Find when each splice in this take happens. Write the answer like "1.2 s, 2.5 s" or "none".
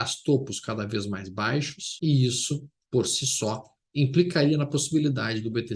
1.8 s